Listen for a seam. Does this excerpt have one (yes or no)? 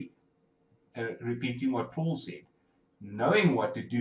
no